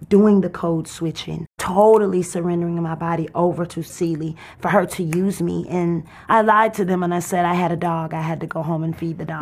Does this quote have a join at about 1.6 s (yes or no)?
yes